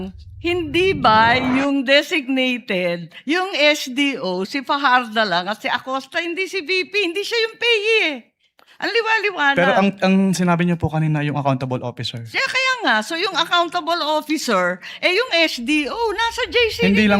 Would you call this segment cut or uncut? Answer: uncut